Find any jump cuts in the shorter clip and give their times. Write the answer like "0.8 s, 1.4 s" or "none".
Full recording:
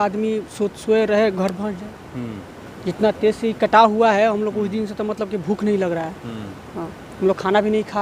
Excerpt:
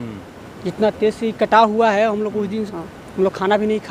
2.7 s